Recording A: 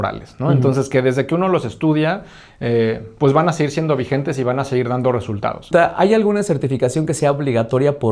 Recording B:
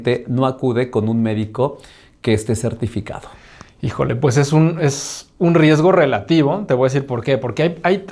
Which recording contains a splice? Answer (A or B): A